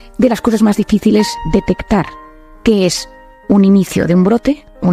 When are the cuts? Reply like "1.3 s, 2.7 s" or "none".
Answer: 1.4 s

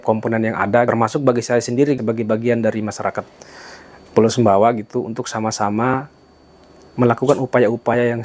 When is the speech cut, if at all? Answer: 0.9 s, 2.0 s

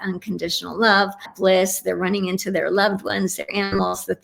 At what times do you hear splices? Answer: 1.3 s

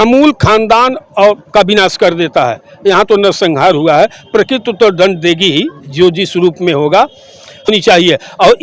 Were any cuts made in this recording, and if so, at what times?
7.7 s

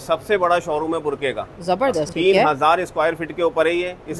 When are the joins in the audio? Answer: 2.1 s

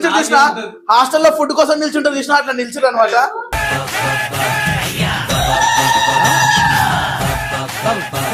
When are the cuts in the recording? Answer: none

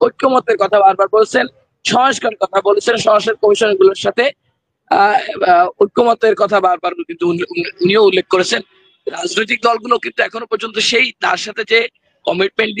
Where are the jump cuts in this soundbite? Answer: none

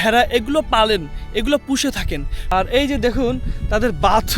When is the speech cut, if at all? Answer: 2.3 s

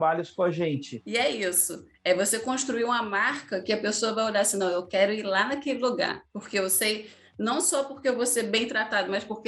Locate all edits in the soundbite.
1.0 s

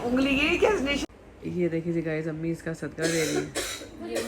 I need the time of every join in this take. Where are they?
1.0 s

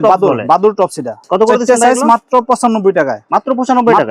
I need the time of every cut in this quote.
1.2 s

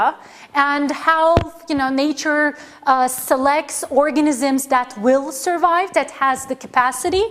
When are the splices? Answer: 3.4 s

